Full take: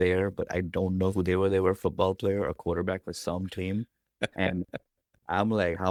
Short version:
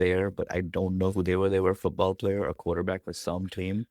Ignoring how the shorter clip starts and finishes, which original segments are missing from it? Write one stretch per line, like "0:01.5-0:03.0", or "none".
none